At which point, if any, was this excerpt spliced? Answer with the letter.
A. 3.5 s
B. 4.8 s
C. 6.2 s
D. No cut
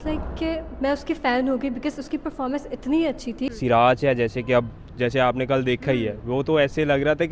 A